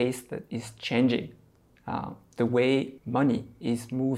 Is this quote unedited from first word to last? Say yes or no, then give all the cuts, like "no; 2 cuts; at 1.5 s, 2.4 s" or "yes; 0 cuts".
no; 1 cut; at 3.0 s